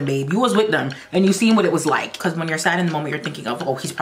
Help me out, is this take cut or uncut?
cut